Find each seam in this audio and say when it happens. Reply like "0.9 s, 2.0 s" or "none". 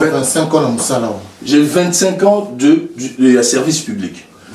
1.3 s